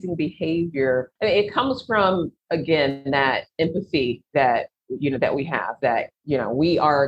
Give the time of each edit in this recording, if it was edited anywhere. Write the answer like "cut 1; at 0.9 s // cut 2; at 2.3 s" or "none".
cut 1; at 1.1 s // cut 2; at 6.2 s